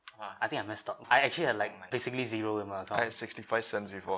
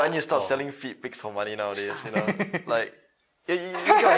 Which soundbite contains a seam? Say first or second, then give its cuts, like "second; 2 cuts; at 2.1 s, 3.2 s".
first; 2 cuts; at 1.0 s, 1.8 s